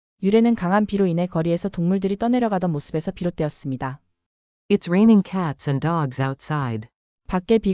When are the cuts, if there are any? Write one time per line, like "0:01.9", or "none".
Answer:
none